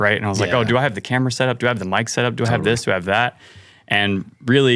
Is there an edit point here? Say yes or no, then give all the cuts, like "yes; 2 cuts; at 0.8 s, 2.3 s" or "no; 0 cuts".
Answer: no; 0 cuts